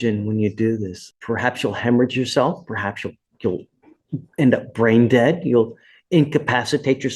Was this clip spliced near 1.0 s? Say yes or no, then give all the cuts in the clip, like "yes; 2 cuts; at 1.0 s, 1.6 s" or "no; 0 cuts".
yes; 1 cut; at 1.0 s